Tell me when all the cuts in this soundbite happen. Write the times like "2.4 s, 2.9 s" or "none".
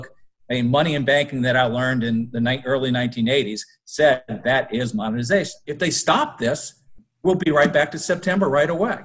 5.6 s